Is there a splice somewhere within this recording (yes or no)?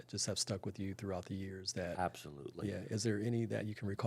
no